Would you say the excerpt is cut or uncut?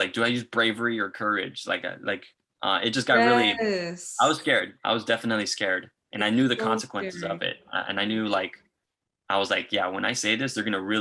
uncut